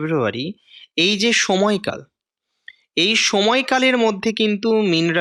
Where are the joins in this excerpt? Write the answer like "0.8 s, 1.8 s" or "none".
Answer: none